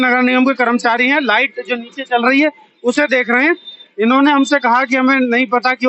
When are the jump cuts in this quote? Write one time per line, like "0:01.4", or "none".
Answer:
none